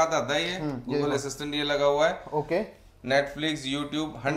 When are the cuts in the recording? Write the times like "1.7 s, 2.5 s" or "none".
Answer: none